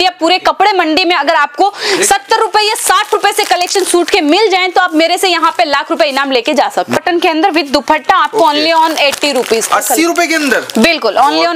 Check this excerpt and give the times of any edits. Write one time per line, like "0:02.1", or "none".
0:07.0